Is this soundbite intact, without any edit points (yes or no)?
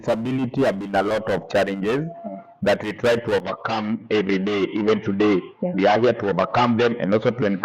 yes